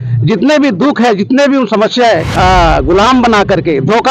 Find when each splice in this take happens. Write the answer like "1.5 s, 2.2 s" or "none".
2.3 s